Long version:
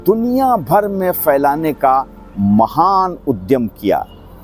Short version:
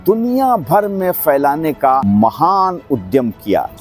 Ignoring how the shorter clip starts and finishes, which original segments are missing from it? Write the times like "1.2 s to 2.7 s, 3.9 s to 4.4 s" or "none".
2.0 s to 2.4 s